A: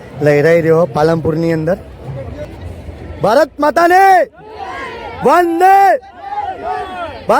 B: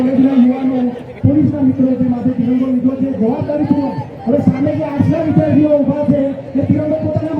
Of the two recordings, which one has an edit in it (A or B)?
A